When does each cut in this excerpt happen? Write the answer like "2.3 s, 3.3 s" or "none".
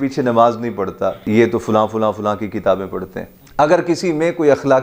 1.2 s, 3.3 s